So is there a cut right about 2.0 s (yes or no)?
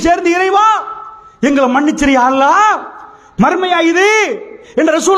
yes